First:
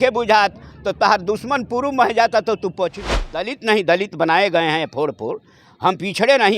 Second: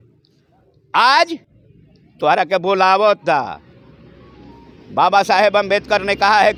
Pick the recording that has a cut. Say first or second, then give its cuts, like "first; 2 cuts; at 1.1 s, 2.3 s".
first; 1 cut; at 3.5 s